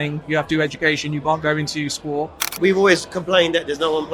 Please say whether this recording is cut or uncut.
cut